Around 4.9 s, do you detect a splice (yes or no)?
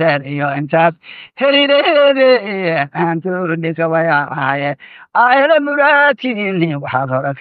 no